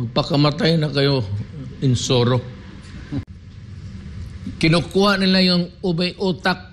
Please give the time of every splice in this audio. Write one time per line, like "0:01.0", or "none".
0:03.3